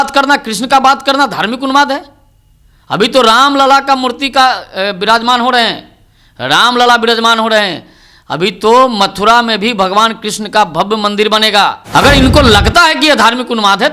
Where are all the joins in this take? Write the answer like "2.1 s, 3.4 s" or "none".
11.8 s